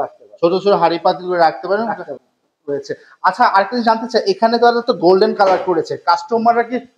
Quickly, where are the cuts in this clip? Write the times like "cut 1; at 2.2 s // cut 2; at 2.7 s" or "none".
none